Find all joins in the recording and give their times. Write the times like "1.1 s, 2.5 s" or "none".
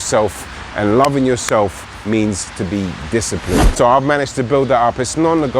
3.7 s